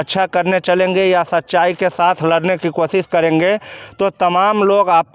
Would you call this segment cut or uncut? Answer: uncut